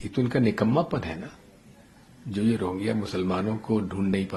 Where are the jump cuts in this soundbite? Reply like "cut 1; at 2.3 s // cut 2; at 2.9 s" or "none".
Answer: none

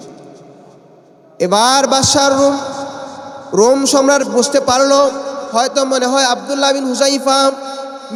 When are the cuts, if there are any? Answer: none

